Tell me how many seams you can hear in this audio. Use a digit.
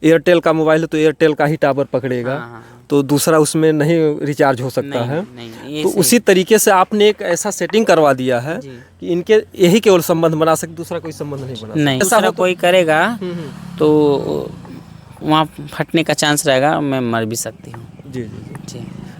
1